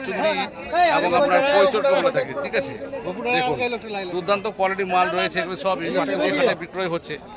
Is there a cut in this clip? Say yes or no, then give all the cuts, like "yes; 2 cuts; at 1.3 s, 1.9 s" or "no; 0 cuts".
no; 0 cuts